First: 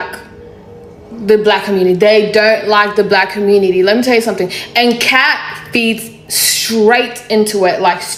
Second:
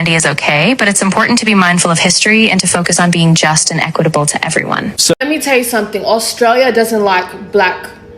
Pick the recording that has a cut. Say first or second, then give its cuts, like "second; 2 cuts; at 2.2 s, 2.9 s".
second; 1 cut; at 5.1 s